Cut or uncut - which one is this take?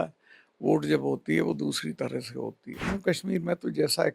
cut